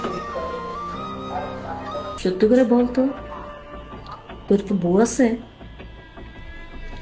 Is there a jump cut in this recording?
yes; 1 cut; at 2.2 s

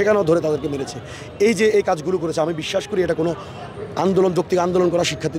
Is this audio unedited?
yes; 0 cuts

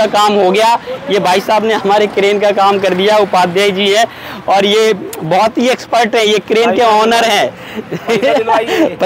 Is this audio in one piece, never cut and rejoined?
yes; 0 cuts

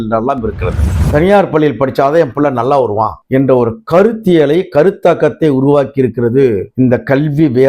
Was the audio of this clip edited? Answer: yes; 1 cut; at 0.9 s

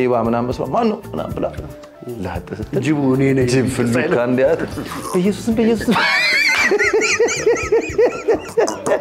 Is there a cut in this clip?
no; 0 cuts

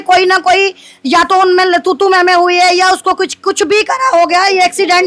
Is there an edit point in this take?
no; 0 cuts

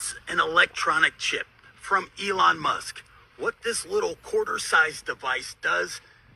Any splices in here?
yes; 1 cut; at 2.1 s

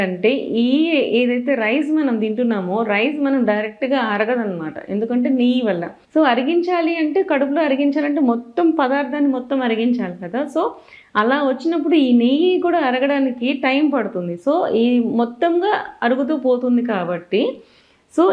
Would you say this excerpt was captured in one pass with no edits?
no; 1 cut; at 5.9 s

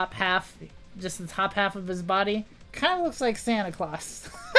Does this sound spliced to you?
no; 0 cuts

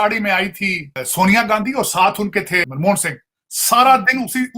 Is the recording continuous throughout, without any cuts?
no; 2 cuts; at 1.0 s, 2.7 s

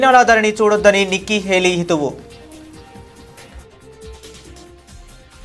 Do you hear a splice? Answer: yes; 1 cut; at 2.2 s

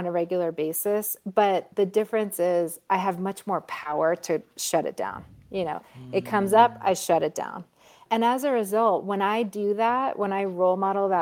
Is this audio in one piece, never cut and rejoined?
no; 2 cuts; at 1.7 s, 8.0 s

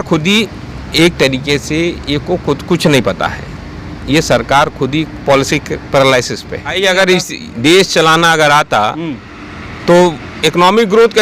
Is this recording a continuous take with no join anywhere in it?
no; 1 cut; at 6.8 s

